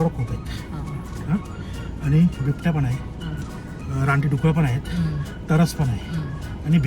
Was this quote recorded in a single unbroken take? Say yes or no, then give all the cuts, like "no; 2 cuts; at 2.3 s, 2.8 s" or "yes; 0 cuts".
yes; 0 cuts